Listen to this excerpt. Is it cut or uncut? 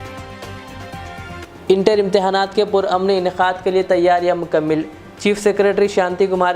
cut